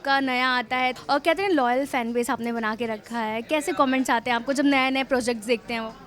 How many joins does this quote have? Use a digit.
1